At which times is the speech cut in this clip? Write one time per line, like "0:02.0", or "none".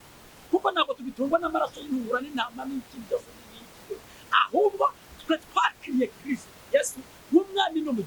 none